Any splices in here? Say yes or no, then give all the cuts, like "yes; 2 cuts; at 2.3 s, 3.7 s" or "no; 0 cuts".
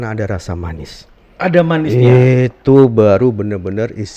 no; 0 cuts